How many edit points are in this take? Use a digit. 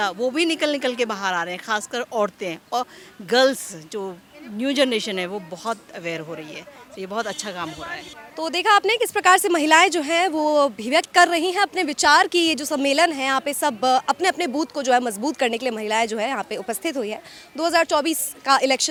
0